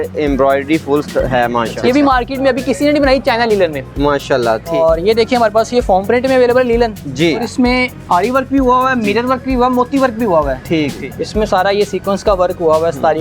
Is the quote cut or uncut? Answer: cut